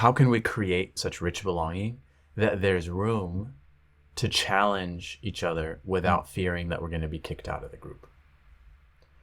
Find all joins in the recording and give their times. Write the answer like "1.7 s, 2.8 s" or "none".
1.0 s